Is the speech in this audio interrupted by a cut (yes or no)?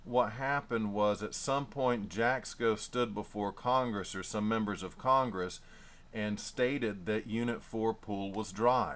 no